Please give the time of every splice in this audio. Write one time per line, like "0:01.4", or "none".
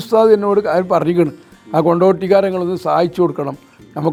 none

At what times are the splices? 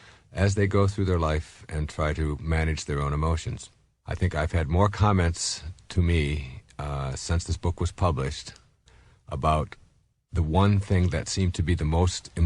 0:02.8

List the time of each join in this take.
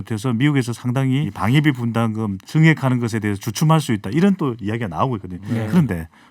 0:01.3
0:02.4

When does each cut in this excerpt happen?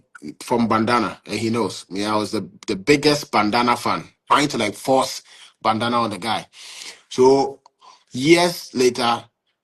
0:04.1

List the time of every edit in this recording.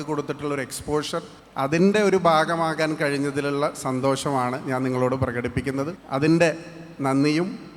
0:01.4
0:06.0

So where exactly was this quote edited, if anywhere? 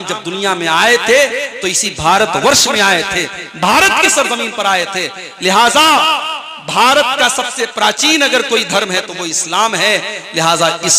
none

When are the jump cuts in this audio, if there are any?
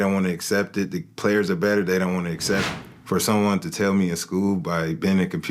0:02.7

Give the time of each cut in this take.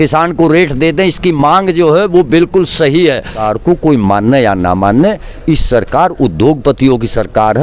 0:03.4

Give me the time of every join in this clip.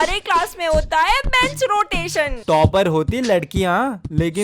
0:02.3

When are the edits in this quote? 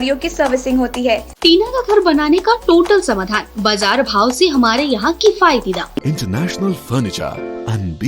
0:01.3
0:06.0

